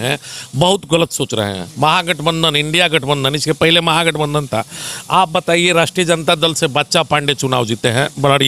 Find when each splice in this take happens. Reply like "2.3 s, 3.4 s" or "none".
none